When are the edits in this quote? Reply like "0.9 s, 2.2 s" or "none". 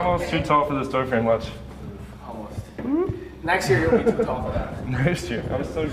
none